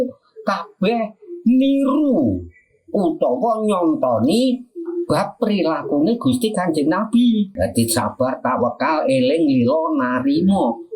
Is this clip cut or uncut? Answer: cut